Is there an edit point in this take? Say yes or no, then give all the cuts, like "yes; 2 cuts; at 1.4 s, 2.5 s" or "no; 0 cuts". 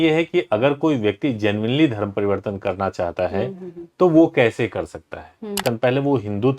yes; 1 cut; at 5.6 s